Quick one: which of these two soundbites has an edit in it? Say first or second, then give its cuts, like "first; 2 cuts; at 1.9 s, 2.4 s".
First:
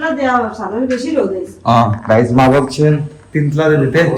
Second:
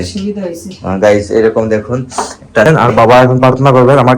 second; 1 cut; at 2.7 s